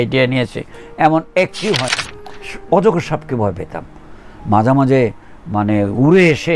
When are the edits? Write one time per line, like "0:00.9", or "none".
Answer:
0:01.9